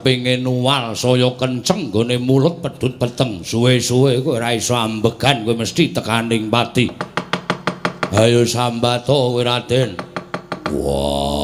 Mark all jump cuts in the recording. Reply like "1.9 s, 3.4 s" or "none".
none